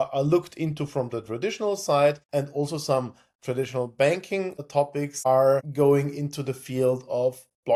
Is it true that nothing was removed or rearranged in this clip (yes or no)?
yes